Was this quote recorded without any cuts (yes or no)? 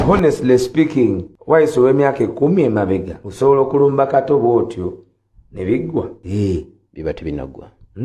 no